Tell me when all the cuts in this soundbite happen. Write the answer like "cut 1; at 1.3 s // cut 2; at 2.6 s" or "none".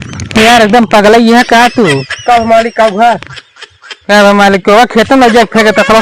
none

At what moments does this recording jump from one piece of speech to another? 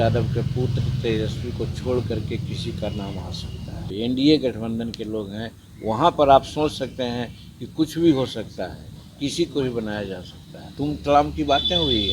cut 1; at 3.9 s // cut 2; at 10.6 s

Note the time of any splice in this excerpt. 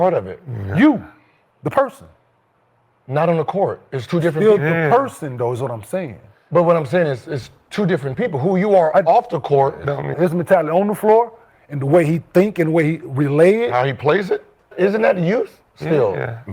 cut 1; at 10.1 s // cut 2; at 14.7 s

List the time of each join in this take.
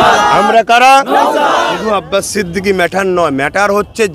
cut 1; at 1.8 s

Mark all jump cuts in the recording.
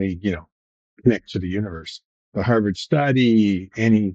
cut 1; at 2.2 s

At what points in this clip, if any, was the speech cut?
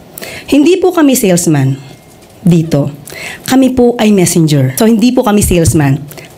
cut 1; at 4.7 s

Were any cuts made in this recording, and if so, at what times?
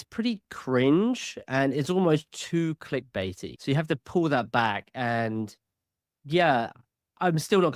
none

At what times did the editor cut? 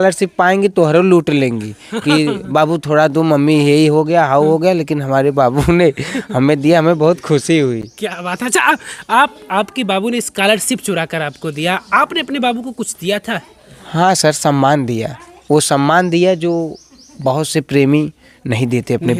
none

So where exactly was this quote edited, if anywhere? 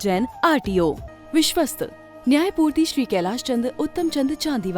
cut 1; at 1.1 s

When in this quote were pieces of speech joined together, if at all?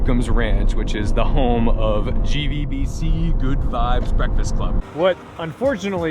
cut 1; at 4.8 s

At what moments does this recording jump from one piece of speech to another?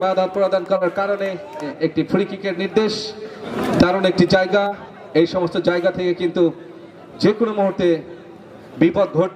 cut 1; at 1.7 s // cut 2; at 3.5 s

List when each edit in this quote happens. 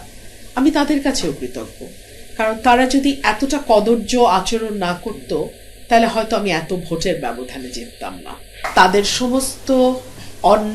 cut 1; at 8.6 s

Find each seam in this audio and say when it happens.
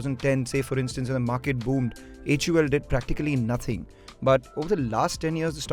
none

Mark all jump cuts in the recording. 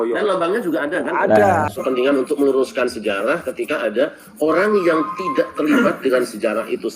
cut 1; at 1.8 s

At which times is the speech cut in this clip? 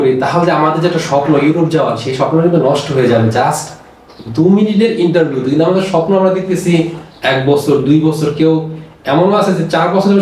none

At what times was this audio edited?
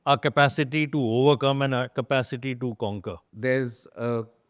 cut 1; at 3.3 s

